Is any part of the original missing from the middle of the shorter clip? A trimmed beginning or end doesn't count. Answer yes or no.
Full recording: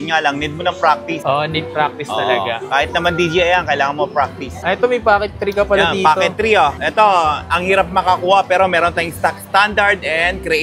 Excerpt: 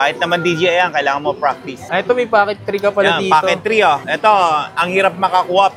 no